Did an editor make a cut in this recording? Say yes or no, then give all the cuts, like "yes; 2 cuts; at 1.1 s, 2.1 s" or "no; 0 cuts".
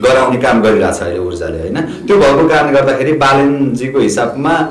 no; 0 cuts